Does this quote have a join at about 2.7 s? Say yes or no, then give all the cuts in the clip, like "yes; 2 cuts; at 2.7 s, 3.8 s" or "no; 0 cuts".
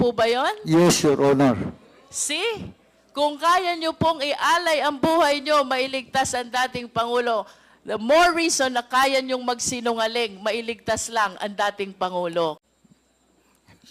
no; 1 cut; at 12.6 s